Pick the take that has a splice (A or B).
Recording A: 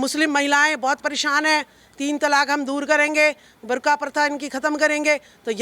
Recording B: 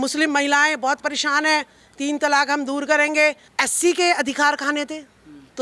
B